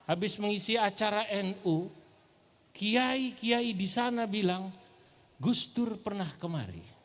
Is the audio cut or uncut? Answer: uncut